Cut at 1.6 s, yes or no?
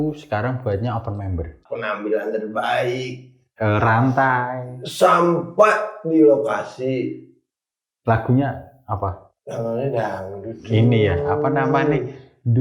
yes